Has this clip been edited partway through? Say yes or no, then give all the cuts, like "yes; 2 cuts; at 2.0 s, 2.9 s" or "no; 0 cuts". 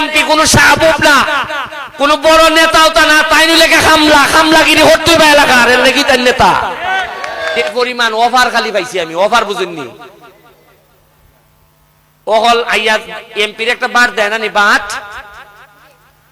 yes; 1 cut; at 7.7 s